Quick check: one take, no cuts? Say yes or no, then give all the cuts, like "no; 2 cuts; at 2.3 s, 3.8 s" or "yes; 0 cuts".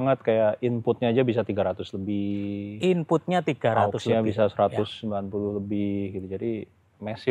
yes; 0 cuts